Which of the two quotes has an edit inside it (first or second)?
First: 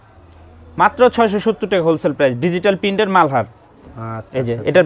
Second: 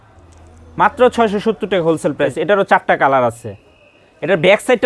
second